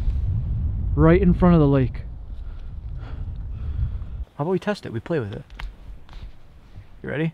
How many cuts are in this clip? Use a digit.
1